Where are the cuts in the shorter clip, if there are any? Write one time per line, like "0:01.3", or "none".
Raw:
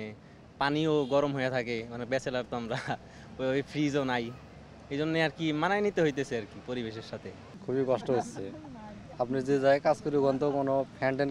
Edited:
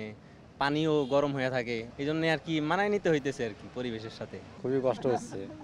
0:01.9
0:04.4